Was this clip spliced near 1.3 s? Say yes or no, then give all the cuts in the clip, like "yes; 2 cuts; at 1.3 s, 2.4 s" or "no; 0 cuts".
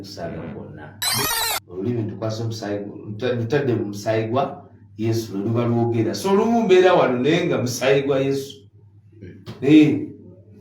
yes; 1 cut; at 1.3 s